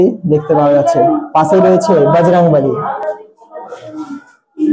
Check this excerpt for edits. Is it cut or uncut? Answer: uncut